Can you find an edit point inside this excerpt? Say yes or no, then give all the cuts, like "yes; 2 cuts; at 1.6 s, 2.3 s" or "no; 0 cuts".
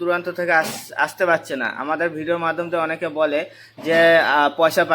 no; 0 cuts